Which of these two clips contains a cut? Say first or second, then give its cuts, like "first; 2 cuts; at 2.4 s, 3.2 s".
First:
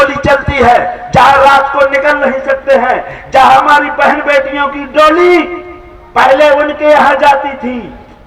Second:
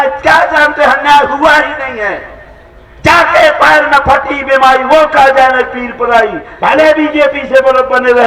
second; 1 cut; at 6.5 s